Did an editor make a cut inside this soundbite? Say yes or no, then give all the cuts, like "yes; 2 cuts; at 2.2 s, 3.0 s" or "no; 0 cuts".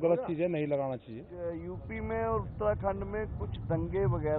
yes; 1 cut; at 1.6 s